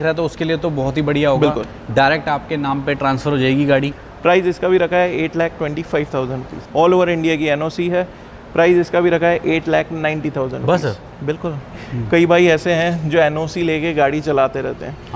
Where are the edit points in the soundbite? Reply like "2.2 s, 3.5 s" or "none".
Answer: 3.9 s, 6.5 s, 11.8 s